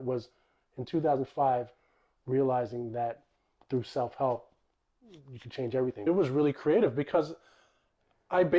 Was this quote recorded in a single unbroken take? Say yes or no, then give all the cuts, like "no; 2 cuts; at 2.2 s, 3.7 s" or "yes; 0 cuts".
no; 1 cut; at 6.1 s